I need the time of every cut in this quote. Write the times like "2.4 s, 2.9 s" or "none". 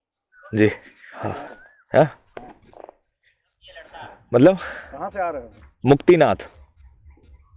none